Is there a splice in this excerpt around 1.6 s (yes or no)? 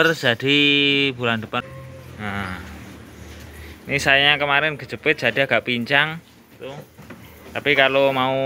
yes